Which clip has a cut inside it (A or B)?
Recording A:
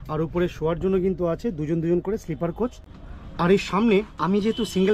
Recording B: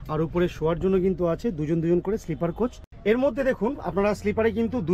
B